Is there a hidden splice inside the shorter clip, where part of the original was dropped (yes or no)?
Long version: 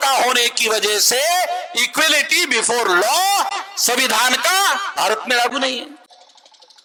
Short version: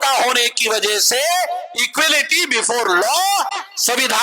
no